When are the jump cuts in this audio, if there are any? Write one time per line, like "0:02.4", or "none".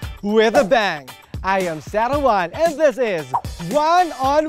none